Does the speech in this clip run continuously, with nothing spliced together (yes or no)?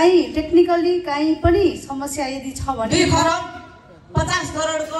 no